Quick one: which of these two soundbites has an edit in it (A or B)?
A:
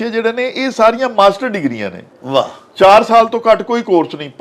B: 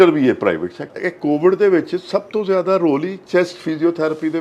B